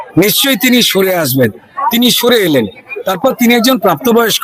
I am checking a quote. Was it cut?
no; 0 cuts

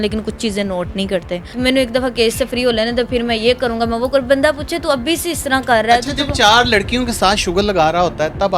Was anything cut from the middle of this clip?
yes; 1 cut; at 1.5 s

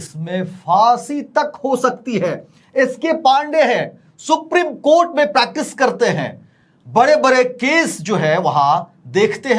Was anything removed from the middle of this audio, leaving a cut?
no; 0 cuts

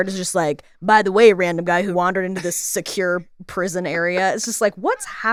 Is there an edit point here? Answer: no; 0 cuts

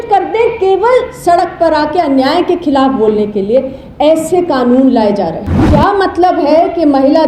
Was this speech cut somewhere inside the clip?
yes; 1 cut; at 5.6 s

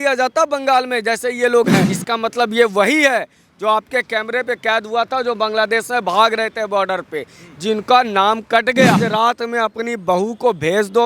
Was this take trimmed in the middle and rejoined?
yes; 2 cuts; at 1.9 s, 9.0 s

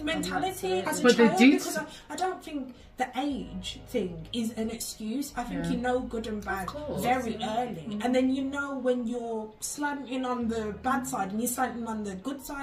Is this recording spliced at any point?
no; 0 cuts

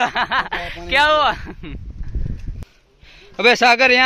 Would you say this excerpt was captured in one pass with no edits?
no; 1 cut; at 2.5 s

